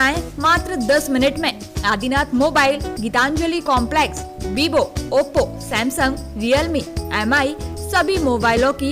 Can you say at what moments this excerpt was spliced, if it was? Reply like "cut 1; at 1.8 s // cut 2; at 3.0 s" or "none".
none